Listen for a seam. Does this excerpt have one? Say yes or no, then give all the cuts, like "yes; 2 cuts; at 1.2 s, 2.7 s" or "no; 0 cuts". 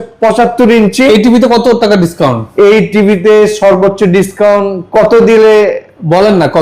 no; 0 cuts